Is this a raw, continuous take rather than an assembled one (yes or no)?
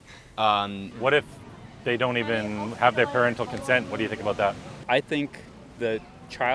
no